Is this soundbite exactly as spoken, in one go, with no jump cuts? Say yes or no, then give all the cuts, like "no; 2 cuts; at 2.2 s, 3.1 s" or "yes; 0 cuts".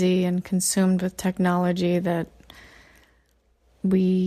yes; 0 cuts